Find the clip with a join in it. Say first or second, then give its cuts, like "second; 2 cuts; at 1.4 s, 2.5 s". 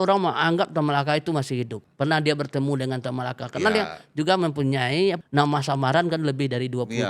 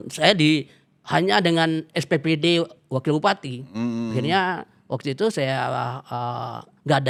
first; 2 cuts; at 1.8 s, 5.2 s